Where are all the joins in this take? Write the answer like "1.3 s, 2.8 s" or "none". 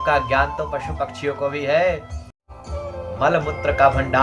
2.3 s